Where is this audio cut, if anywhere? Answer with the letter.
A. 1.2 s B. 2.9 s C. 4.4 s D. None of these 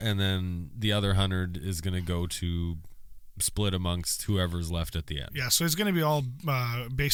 D